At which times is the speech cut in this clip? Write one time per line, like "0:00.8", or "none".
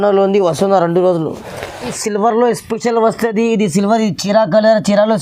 0:02.0